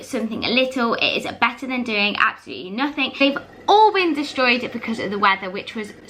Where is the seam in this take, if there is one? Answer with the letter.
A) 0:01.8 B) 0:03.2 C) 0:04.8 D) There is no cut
B